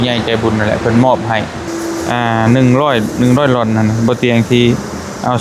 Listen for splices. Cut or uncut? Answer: cut